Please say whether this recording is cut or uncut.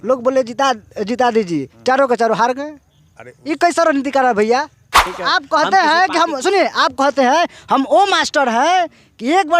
cut